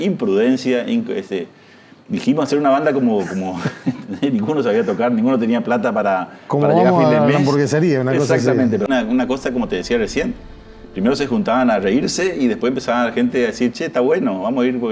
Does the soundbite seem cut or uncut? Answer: cut